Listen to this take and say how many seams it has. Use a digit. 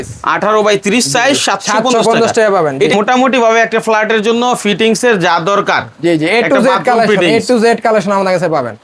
1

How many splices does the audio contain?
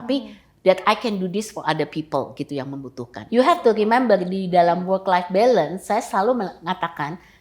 1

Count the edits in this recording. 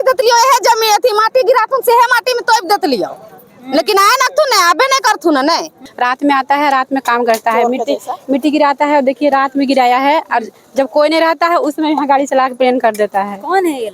1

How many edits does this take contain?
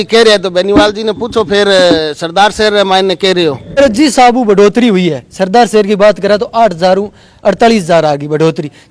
1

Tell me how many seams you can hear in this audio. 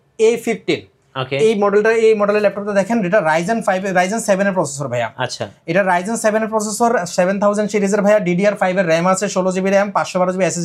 0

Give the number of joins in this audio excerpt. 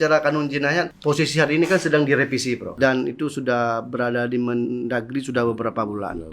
2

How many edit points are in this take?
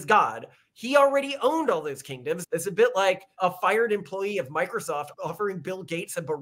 3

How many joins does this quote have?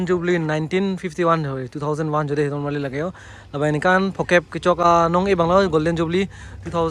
1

